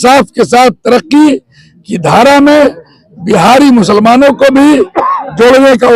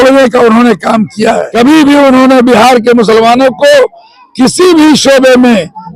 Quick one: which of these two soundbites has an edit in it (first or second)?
second